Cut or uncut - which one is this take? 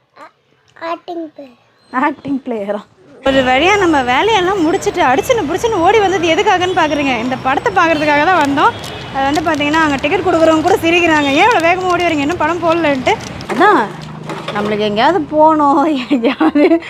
cut